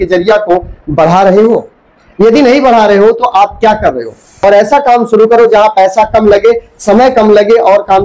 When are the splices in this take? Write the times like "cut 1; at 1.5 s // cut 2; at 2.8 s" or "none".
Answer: cut 1; at 4.3 s